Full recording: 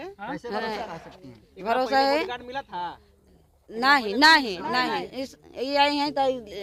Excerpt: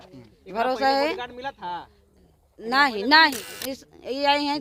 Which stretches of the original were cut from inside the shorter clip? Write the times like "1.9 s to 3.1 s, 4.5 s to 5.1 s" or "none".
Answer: 4.6 s to 5.1 s